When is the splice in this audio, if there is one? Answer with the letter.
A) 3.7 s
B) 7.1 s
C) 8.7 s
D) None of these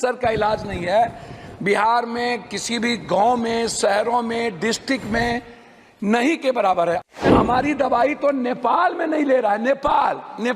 B